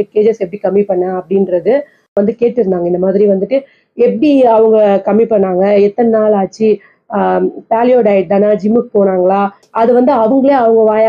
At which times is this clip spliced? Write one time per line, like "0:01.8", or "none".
0:02.2